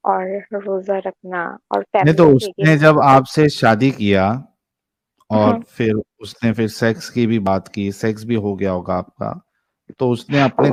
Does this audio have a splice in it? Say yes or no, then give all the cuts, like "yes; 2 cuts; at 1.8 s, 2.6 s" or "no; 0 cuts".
no; 0 cuts